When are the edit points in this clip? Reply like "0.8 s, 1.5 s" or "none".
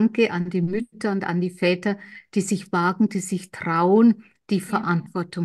none